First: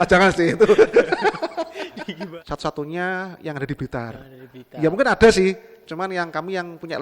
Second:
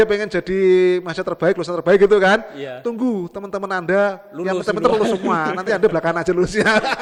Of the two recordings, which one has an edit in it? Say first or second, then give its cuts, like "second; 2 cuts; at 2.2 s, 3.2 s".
first; 1 cut; at 2.1 s